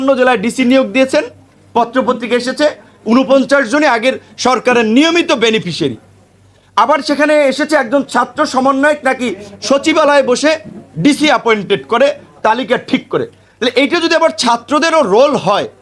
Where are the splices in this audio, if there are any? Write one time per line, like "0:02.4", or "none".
none